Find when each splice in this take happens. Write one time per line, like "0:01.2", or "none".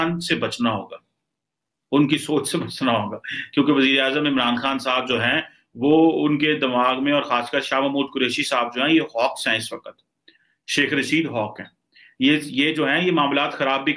none